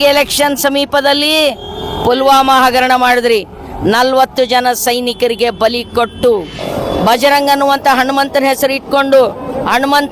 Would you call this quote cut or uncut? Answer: cut